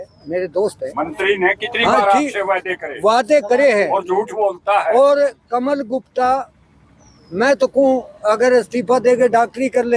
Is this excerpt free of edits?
yes; 0 cuts

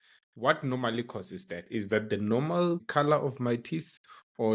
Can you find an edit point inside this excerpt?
yes; 1 cut; at 1.7 s

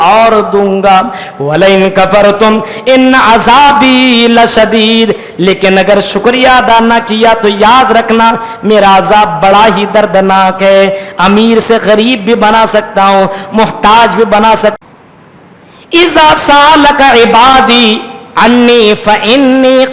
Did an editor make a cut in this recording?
yes; 1 cut; at 14.8 s

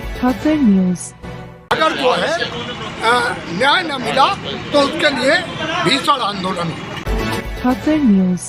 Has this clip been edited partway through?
yes; 2 cuts; at 1.8 s, 6.9 s

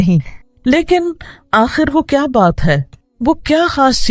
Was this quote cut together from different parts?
yes; 1 cut; at 2.1 s

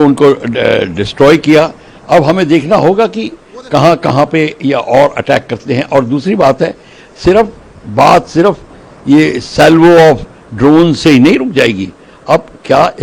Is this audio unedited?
yes; 0 cuts

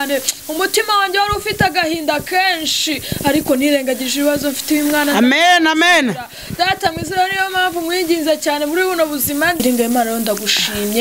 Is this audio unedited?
no; 1 cut; at 9.6 s

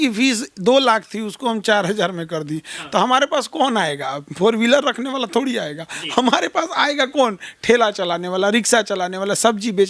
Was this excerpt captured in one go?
yes; 0 cuts

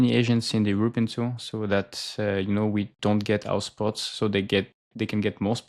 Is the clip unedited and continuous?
yes; 0 cuts

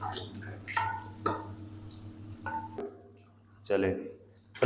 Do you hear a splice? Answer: yes; 1 cut; at 2.7 s

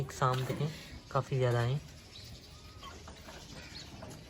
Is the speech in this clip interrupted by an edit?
no; 0 cuts

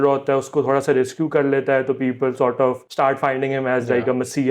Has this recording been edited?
yes; 1 cut; at 2.8 s

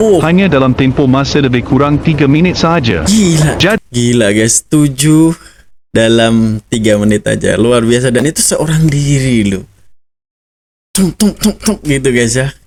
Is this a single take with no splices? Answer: yes; 0 cuts

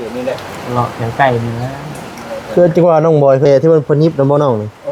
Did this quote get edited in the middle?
yes; 1 cut; at 3.5 s

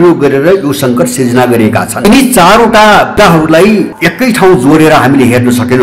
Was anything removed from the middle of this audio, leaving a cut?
yes; 1 cut; at 2.0 s

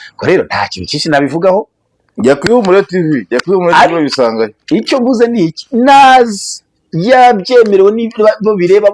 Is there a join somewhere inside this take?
no; 0 cuts

